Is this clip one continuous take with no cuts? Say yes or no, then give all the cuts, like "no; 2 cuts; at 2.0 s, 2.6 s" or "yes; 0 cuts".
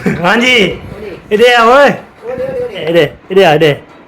no; 1 cut; at 3.0 s